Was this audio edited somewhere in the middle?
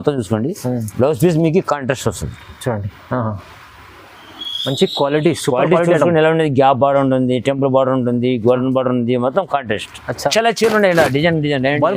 yes; 1 cut; at 10.3 s

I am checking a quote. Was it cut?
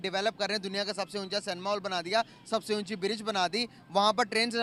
no; 0 cuts

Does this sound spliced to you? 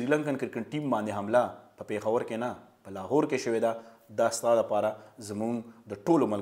no; 0 cuts

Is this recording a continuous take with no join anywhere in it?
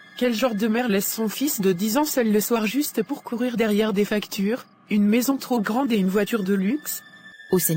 yes; 0 cuts

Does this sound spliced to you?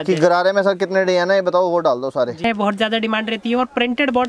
yes; 1 cut; at 2.4 s

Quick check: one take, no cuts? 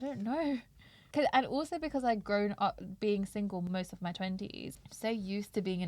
yes; 0 cuts

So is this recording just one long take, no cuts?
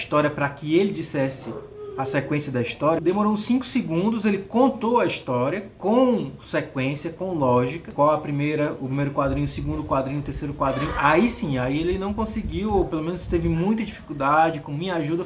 no; 2 cuts; at 3.0 s, 7.9 s

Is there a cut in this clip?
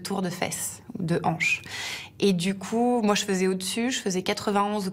no; 0 cuts

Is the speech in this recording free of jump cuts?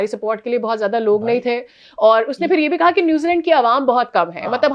yes; 0 cuts

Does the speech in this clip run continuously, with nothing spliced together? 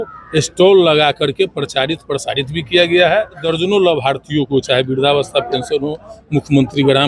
no; 1 cut; at 3.5 s

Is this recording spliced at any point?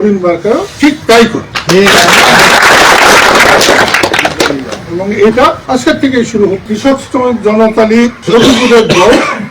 yes; 5 cuts; at 1.5 s, 4.8 s, 5.6 s, 6.6 s, 8.2 s

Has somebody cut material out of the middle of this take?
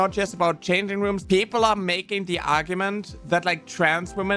yes; 1 cut; at 1.2 s

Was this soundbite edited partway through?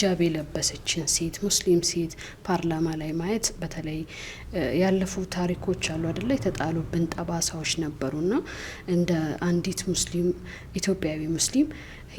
no; 0 cuts

